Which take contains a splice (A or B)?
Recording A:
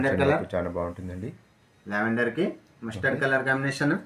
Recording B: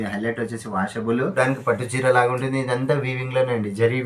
B